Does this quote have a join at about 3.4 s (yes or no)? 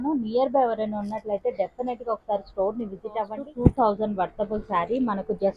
yes